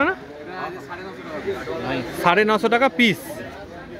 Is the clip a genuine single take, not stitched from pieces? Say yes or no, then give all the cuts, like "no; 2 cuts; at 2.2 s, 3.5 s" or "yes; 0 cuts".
yes; 0 cuts